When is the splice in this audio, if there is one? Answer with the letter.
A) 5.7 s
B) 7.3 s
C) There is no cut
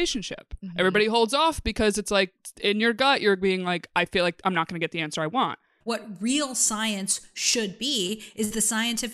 A